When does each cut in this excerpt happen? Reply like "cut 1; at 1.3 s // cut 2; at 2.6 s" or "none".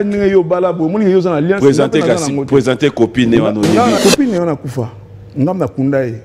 cut 1; at 4.0 s